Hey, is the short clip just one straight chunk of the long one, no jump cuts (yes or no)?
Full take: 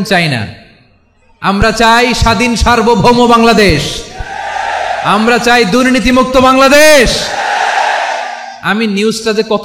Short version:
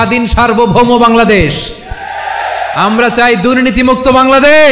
yes